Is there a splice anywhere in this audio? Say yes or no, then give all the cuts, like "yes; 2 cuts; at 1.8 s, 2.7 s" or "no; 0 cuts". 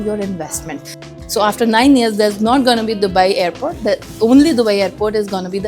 yes; 1 cut; at 1.1 s